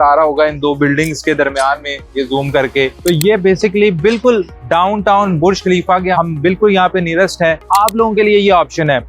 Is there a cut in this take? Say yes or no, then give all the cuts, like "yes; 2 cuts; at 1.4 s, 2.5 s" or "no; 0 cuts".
yes; 1 cut; at 7.6 s